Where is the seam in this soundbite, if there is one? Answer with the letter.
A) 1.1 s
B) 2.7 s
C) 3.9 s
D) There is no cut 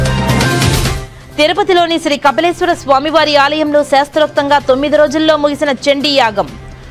A